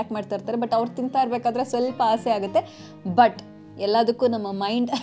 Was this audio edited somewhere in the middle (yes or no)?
no